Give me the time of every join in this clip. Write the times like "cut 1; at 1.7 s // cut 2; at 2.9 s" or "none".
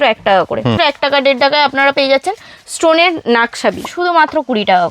cut 1; at 0.8 s // cut 2; at 3.9 s